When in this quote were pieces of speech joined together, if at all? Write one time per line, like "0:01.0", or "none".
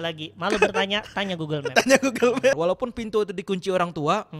0:02.5